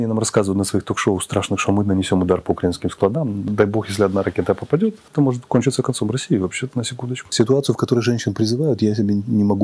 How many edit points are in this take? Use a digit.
3